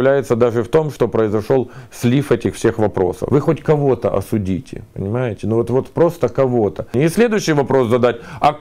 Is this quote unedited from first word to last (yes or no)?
no